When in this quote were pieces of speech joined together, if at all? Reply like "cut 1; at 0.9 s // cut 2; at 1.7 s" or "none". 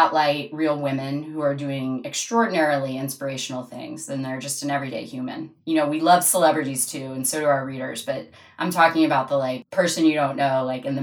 cut 1; at 9.6 s